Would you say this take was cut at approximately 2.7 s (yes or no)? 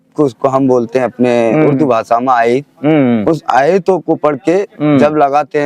no